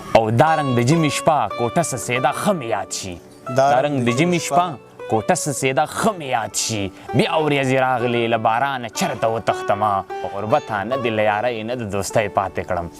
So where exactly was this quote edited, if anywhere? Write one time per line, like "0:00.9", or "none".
0:10.4